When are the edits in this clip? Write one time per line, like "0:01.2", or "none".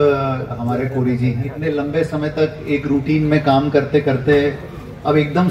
0:01.5
0:02.6